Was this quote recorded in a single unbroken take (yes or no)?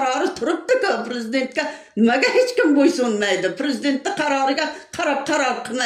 yes